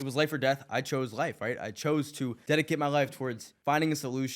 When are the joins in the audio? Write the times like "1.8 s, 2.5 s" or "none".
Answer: 2.4 s, 3.5 s